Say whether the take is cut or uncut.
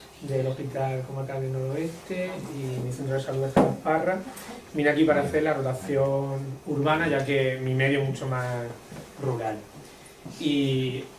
uncut